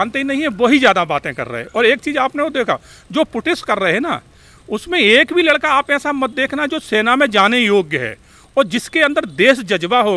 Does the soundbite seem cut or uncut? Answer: uncut